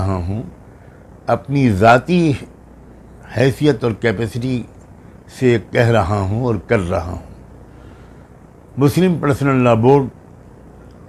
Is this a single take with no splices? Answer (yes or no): yes